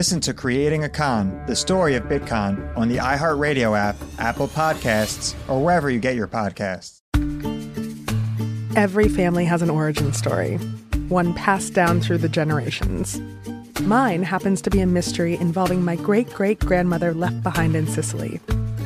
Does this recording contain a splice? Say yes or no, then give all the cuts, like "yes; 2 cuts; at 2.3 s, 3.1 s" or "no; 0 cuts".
yes; 1 cut; at 6.9 s